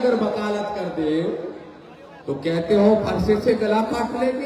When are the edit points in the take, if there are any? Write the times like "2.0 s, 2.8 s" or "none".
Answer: none